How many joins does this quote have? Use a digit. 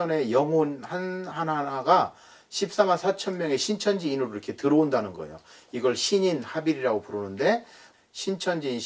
1